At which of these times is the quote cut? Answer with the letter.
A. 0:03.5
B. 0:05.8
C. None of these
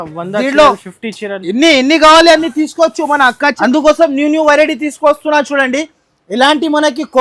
A